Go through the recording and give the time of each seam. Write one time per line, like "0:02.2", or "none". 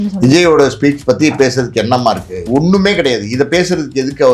0:02.5